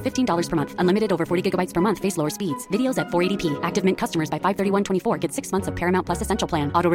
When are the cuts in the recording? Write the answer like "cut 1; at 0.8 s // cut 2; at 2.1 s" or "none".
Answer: none